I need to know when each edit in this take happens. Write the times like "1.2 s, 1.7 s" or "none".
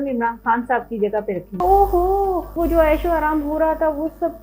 1.5 s, 2.6 s

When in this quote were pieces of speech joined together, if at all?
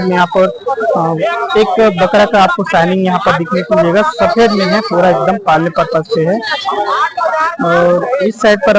none

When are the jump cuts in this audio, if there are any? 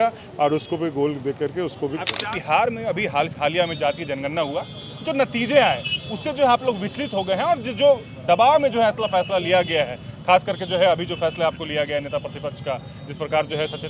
2.1 s

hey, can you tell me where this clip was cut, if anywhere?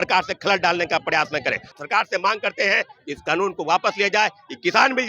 1.7 s

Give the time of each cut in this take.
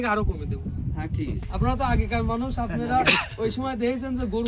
1.4 s

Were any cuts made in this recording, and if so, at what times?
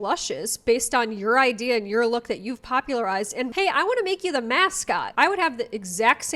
5.1 s

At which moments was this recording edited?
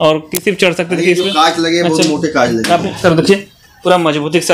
none

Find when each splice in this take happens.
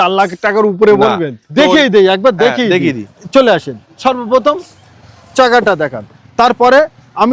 1.5 s

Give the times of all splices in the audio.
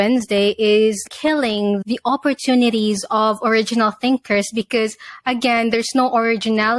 none

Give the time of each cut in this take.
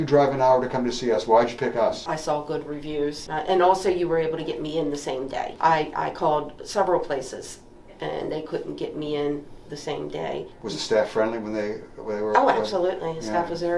2.1 s, 3.2 s, 5.5 s, 10.5 s

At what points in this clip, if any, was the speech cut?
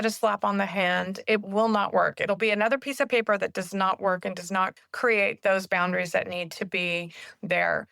4.8 s

